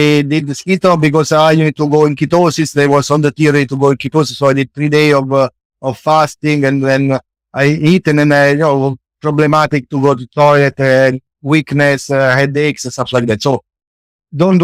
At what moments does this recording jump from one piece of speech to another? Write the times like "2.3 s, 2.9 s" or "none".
none